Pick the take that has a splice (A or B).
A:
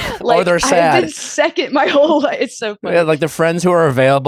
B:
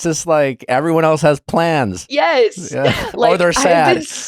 B